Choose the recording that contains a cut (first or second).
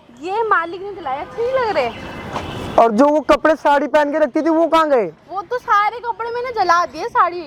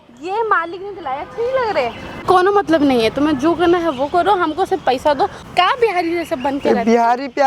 second